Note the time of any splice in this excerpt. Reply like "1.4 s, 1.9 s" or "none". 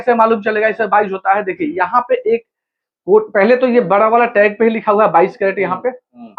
none